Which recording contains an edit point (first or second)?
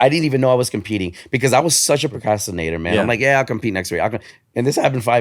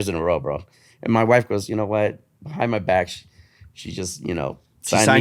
first